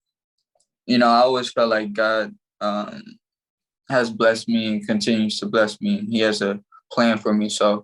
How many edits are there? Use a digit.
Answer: 0